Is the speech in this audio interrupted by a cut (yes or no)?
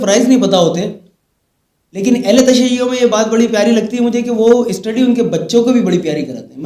no